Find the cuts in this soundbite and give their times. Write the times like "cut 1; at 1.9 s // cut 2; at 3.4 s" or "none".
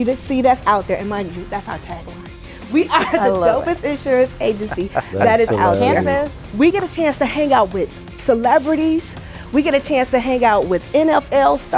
cut 1; at 6.7 s